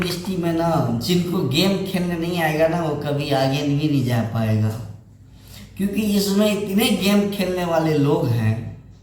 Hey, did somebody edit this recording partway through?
no; 0 cuts

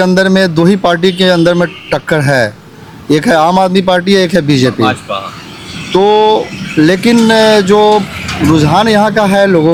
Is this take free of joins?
yes; 0 cuts

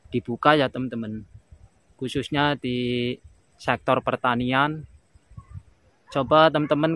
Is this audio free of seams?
no; 1 cut; at 5.9 s

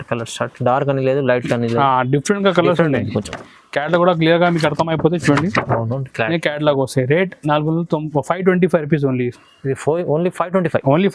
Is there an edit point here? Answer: no; 0 cuts

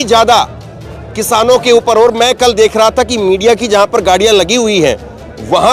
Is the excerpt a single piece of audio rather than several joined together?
yes; 0 cuts

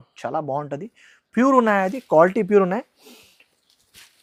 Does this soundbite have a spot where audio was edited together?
no; 0 cuts

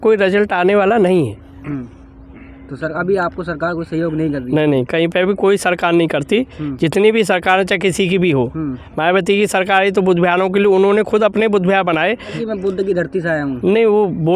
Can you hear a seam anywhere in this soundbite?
yes; 2 cuts; at 1.6 s, 12.3 s

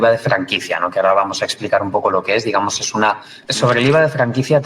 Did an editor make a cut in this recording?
yes; 1 cut; at 3.3 s

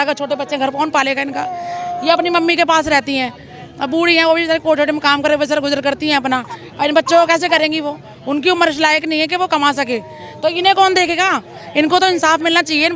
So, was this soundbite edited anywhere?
no; 0 cuts

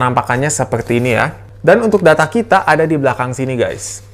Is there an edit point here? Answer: yes; 1 cut; at 1.4 s

